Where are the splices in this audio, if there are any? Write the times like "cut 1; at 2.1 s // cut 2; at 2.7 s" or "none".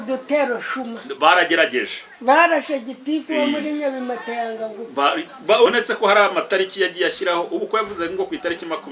cut 1; at 5.7 s

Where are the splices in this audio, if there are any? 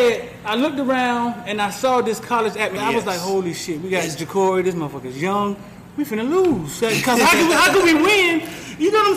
cut 1; at 2.8 s

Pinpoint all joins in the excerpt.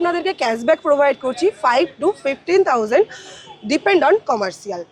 none

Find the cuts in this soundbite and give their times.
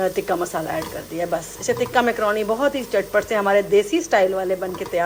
none

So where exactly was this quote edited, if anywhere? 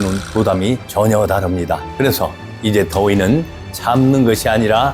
cut 1; at 1.8 s

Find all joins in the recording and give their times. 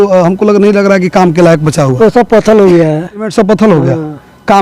cut 1; at 3.3 s

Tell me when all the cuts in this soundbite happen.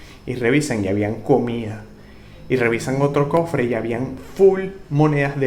none

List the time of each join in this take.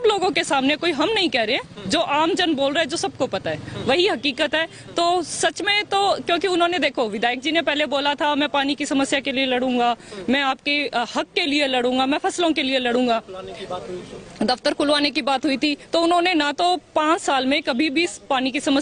none

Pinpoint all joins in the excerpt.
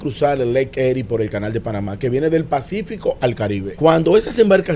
cut 1; at 3.7 s

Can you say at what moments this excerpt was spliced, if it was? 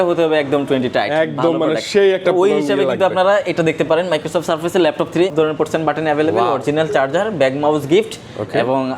cut 1; at 5.3 s

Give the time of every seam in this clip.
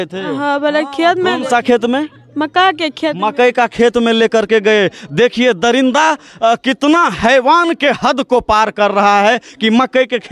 none

